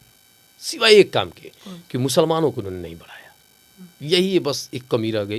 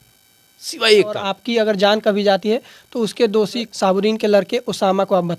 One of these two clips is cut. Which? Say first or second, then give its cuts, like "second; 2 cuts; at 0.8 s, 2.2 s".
second; 2 cuts; at 1.3 s, 3.7 s